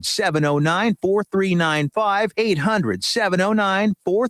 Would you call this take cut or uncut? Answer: cut